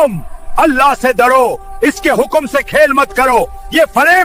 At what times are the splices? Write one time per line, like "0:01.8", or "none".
none